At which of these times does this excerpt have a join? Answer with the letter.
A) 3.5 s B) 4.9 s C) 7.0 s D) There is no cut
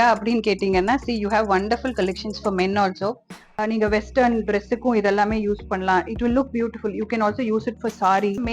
A